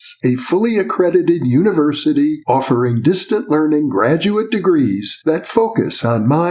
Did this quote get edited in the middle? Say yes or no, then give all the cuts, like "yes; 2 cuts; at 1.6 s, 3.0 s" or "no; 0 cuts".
no; 0 cuts